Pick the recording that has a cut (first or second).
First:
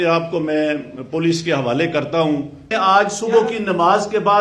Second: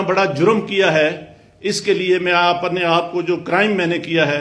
first